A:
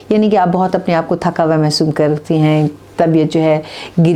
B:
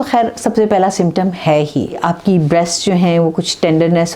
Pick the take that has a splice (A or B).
B